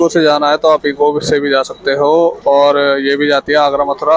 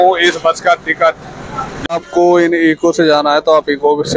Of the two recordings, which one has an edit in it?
second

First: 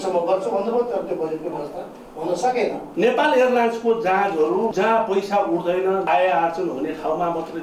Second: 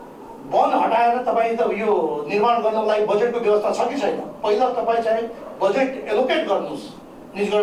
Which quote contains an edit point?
first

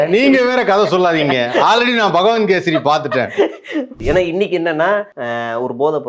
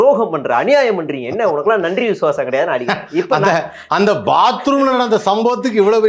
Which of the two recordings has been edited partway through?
first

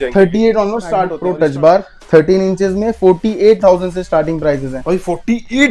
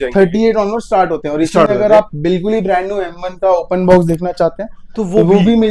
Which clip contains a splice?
first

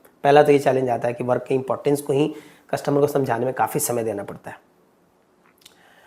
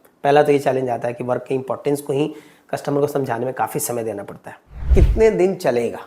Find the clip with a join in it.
second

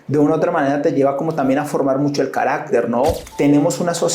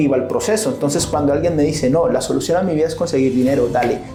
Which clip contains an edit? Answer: first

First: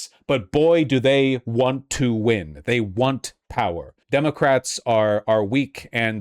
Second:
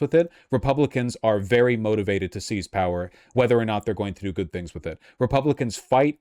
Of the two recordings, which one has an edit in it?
first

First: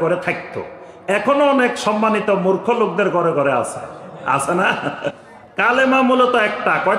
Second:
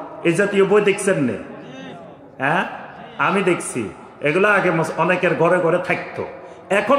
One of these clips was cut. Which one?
first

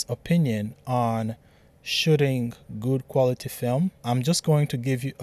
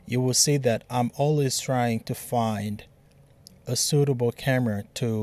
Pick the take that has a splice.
first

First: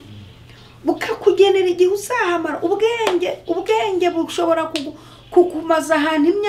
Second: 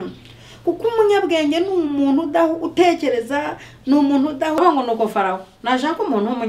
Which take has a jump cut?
second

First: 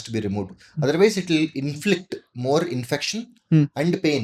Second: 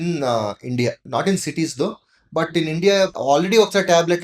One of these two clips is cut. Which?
second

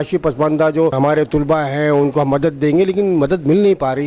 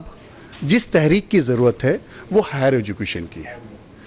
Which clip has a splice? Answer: first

